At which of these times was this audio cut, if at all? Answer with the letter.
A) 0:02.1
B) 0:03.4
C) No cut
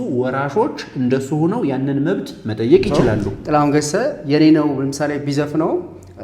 B